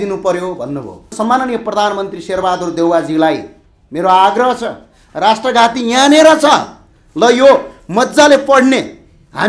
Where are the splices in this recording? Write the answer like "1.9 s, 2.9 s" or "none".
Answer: 1.1 s

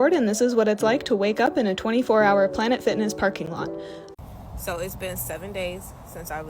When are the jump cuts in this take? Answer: 4.0 s

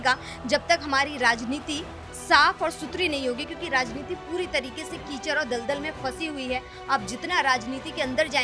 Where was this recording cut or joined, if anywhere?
none

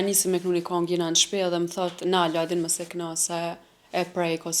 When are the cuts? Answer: none

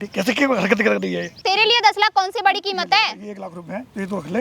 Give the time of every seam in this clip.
1.3 s

